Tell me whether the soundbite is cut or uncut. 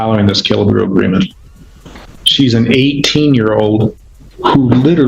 cut